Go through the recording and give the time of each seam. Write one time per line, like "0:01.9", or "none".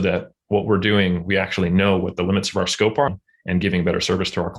0:03.1